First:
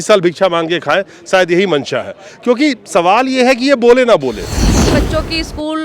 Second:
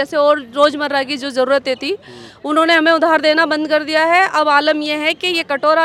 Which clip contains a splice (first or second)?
first